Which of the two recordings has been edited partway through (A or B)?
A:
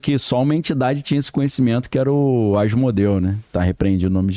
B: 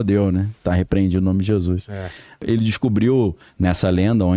B